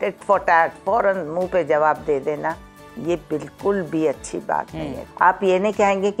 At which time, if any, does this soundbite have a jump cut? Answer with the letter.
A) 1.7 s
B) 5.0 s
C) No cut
B